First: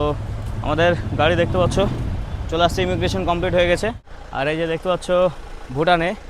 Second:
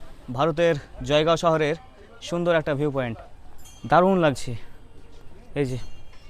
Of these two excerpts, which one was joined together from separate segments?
first; 1 cut; at 4.1 s

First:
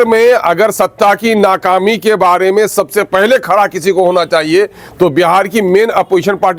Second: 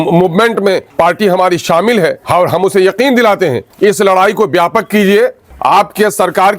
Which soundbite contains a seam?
second; 4 cuts; at 0.9 s, 2.2 s, 3.6 s, 5.5 s

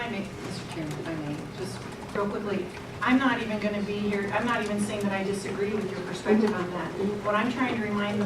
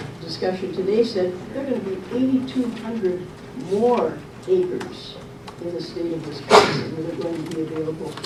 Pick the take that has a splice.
first; 1 cut; at 6.9 s

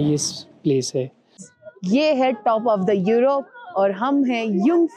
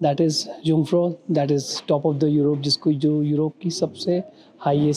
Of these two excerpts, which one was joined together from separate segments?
first; 1 cut; at 1.5 s

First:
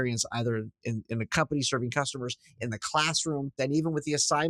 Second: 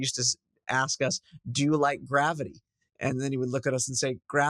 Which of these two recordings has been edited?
first; 1 cut; at 3.5 s

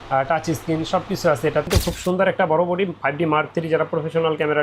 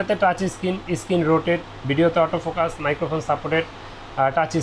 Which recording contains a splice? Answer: first; 1 cut; at 1.7 s

